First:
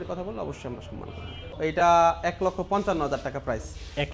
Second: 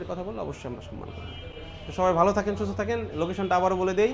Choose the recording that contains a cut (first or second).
first